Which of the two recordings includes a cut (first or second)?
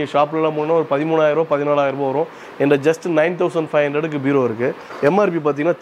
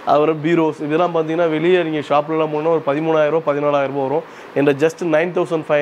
first